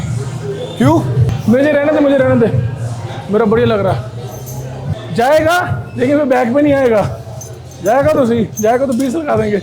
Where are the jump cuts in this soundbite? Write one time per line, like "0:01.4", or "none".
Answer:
0:01.3
0:05.0